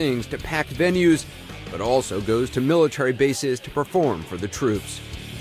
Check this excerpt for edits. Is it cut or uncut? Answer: uncut